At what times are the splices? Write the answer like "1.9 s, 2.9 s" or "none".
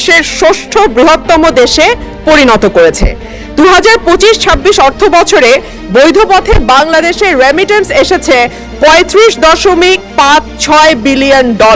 none